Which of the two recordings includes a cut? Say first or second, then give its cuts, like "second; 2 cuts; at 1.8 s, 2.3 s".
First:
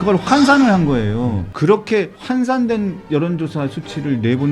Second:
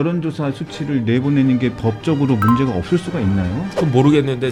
first; 2 cuts; at 1.4 s, 2.2 s